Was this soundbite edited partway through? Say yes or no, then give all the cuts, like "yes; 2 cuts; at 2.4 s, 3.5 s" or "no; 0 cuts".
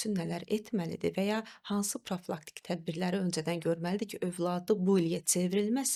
no; 0 cuts